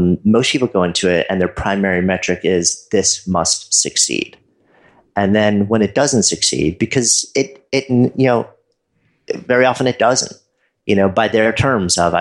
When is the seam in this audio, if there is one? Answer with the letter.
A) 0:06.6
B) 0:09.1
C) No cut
C